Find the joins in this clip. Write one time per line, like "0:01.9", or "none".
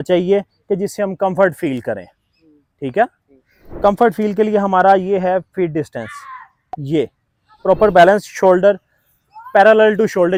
none